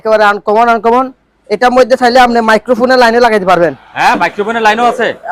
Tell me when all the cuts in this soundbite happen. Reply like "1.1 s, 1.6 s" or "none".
none